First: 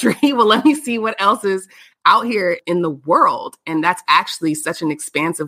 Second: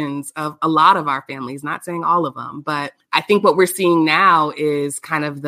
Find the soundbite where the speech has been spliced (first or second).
second